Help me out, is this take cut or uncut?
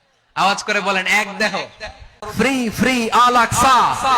cut